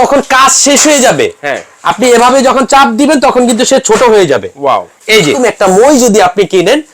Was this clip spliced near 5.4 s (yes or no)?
yes